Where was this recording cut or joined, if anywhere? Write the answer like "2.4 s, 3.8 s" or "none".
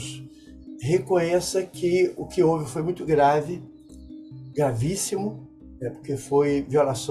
none